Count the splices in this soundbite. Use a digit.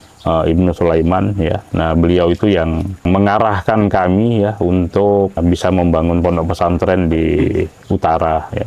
2